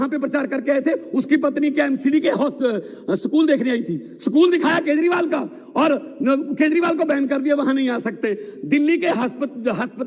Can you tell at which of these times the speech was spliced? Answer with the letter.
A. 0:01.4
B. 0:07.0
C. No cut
C